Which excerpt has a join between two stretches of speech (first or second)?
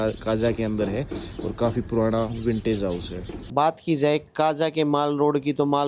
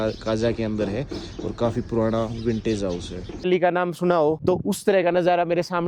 second